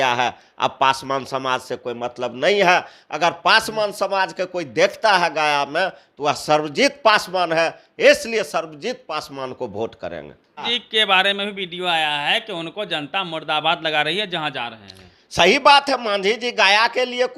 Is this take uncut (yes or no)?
no